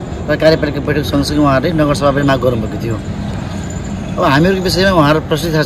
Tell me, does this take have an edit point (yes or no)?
no